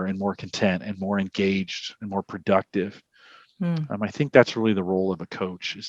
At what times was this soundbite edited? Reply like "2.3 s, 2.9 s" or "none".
none

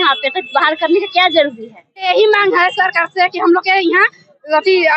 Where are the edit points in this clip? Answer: 2.0 s

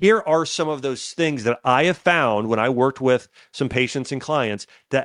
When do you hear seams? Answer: none

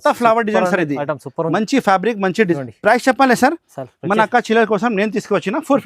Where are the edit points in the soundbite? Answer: 2.6 s

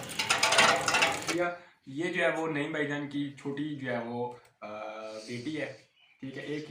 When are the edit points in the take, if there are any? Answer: 1.2 s

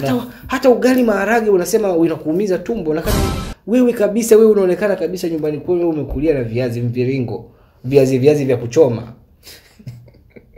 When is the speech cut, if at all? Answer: none

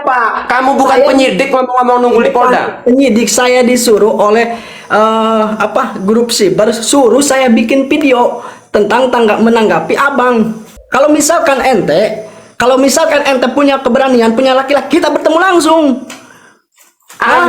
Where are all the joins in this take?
10.8 s

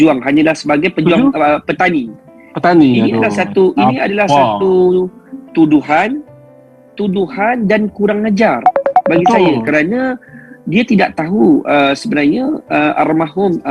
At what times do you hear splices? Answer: none

